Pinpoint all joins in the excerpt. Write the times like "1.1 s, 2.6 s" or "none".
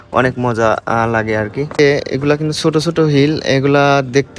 1.8 s